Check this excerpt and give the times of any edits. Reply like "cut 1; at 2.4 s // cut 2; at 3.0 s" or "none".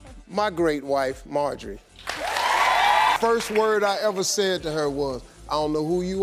cut 1; at 3.2 s